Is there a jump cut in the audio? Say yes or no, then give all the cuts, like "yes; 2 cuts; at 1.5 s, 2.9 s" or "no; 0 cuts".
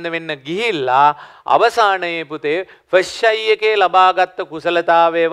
no; 0 cuts